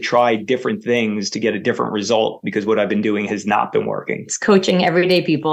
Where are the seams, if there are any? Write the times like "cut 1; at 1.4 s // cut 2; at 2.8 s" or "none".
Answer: none